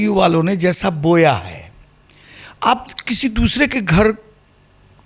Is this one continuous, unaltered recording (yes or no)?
yes